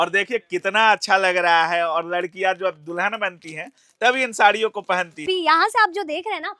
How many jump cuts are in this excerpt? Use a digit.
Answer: 1